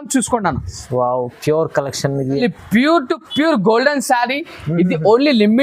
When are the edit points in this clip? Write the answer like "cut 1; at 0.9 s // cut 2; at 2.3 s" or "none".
cut 1; at 2.4 s

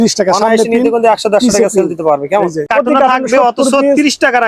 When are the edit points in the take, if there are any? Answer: cut 1; at 2.7 s

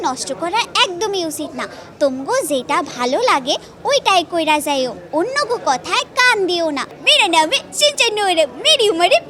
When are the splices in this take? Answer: cut 1; at 7.0 s

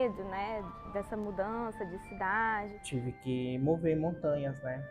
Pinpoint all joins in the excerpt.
cut 1; at 2.8 s

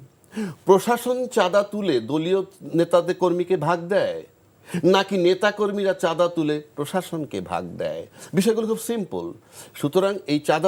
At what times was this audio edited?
none

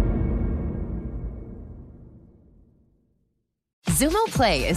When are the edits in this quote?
cut 1; at 3.7 s

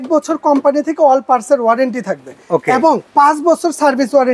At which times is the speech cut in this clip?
cut 1; at 3.0 s

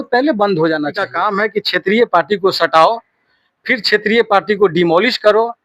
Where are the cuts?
cut 1; at 1.0 s

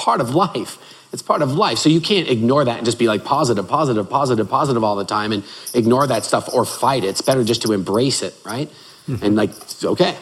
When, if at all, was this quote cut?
none

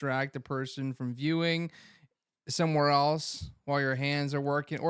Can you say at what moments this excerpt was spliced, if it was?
none

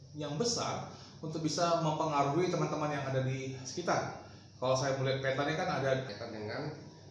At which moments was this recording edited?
cut 1; at 6.1 s

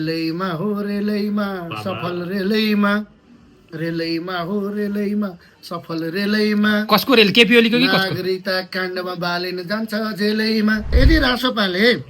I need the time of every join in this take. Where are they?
cut 1; at 10.9 s

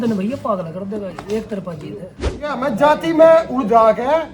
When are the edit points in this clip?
cut 1; at 2.6 s

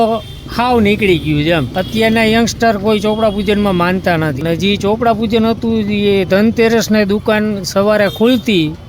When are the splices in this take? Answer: cut 1; at 1.7 s // cut 2; at 4.4 s

